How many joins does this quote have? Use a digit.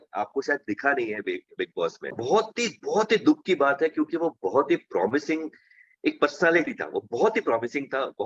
1